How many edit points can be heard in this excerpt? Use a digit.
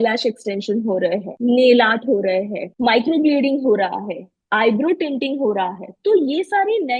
2